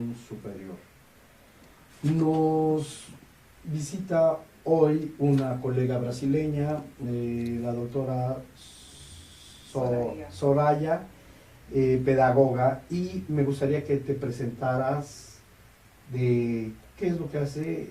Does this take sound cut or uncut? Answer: cut